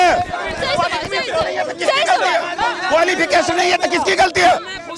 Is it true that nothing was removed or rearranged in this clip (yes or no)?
yes